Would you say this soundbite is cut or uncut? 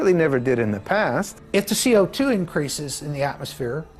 cut